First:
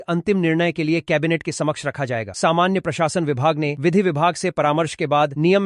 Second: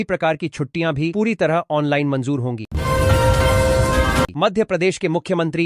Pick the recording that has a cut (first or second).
second